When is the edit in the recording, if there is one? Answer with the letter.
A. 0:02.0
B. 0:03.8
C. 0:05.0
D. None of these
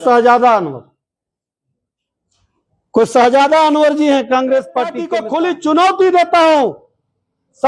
C